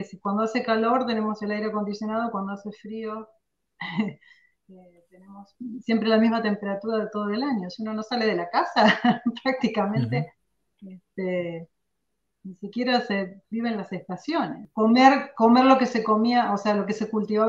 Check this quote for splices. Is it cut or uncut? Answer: cut